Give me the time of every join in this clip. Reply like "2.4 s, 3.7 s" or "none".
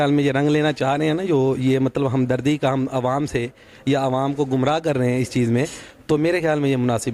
none